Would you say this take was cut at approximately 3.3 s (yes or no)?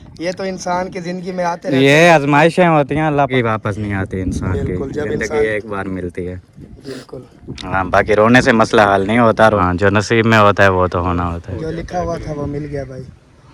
yes